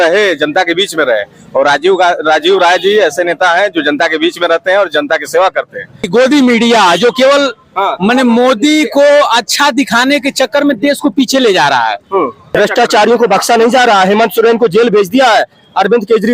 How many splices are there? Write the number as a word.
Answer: two